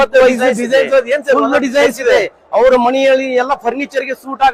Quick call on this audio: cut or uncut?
uncut